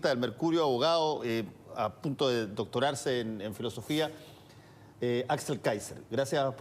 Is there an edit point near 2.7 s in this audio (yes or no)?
yes